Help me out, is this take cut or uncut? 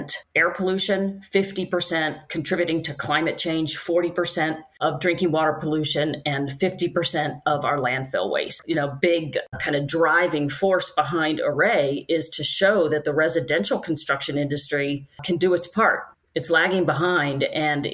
cut